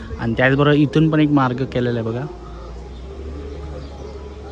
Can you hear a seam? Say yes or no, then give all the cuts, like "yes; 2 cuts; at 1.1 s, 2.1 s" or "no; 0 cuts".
no; 0 cuts